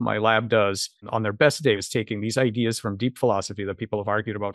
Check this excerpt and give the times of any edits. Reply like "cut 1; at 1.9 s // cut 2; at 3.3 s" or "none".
cut 1; at 1.1 s // cut 2; at 1.8 s

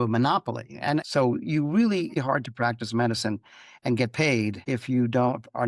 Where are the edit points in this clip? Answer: cut 1; at 1.0 s

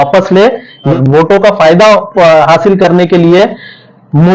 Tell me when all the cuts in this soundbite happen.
cut 1; at 0.9 s

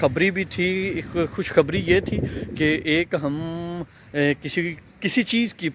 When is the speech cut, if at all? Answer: cut 1; at 4.7 s

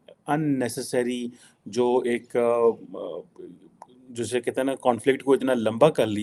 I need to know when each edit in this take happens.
none

